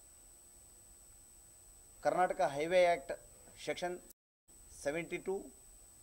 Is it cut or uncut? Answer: uncut